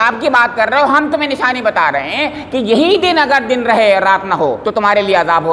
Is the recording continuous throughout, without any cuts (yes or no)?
no